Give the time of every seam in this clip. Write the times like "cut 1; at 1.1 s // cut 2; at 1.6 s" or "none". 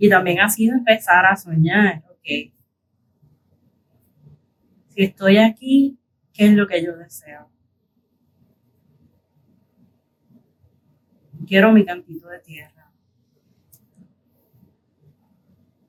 none